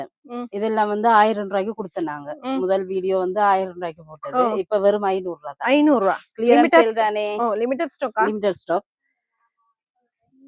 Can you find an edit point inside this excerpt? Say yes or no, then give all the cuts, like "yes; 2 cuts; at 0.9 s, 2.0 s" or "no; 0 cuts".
no; 0 cuts